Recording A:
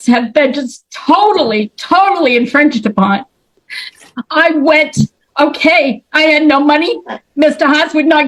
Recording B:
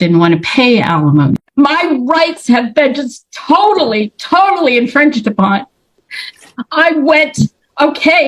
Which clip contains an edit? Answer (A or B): B